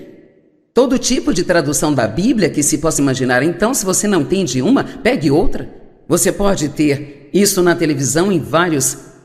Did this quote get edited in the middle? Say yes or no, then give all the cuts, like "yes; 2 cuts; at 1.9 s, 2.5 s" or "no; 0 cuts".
yes; 1 cut; at 2.9 s